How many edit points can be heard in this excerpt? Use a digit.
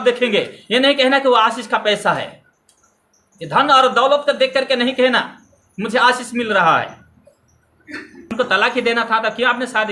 1